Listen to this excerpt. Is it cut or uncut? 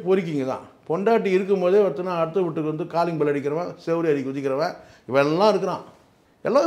uncut